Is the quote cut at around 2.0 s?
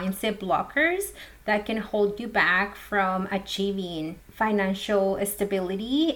no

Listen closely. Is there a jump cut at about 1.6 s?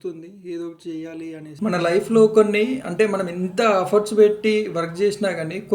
yes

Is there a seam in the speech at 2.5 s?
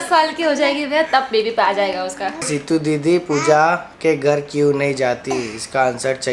yes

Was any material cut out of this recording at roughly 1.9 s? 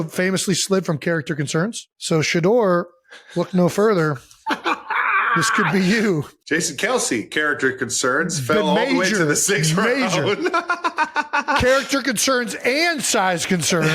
yes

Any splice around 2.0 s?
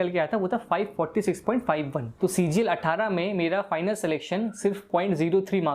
yes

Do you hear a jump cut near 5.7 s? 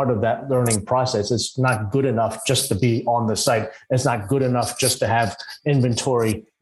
no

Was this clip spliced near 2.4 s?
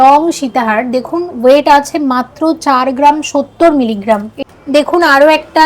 no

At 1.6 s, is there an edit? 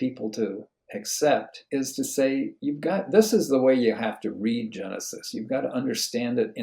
yes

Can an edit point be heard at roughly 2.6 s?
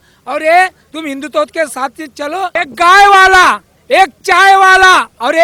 yes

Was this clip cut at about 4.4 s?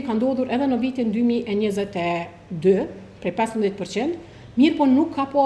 no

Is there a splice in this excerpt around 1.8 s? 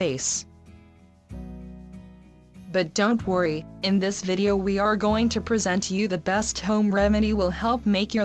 no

